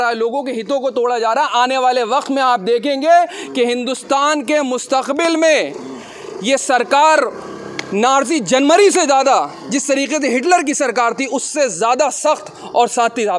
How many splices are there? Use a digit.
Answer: 0